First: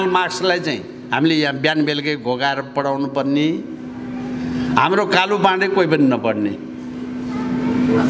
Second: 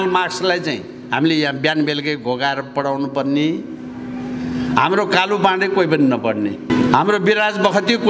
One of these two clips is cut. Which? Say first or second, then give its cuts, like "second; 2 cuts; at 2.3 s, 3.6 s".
second; 1 cut; at 6.7 s